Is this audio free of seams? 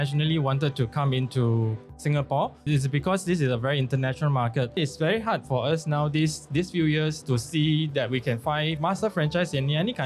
no; 4 cuts; at 2.6 s, 4.8 s, 6.5 s, 8.8 s

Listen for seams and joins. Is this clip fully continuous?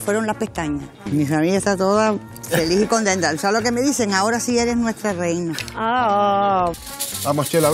no; 3 cuts; at 0.9 s, 2.3 s, 6.8 s

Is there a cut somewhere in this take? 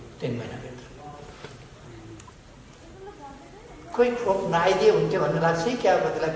no; 0 cuts

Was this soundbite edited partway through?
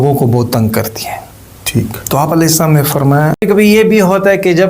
yes; 1 cut; at 3.4 s

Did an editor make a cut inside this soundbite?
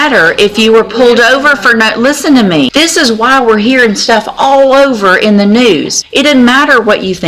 yes; 2 cuts; at 2.7 s, 6.0 s

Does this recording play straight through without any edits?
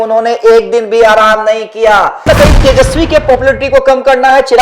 no; 1 cut; at 2.2 s

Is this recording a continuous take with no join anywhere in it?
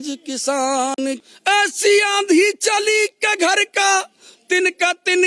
no; 1 cut; at 1.2 s

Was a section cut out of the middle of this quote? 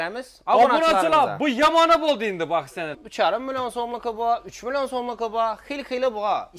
yes; 1 cut; at 3.4 s

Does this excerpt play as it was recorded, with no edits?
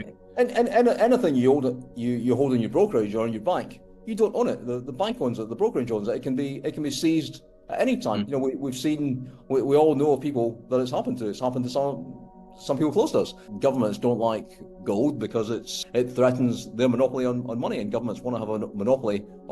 no; 1 cut; at 13.4 s

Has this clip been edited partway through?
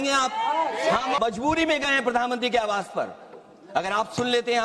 yes; 2 cuts; at 1.2 s, 2.7 s

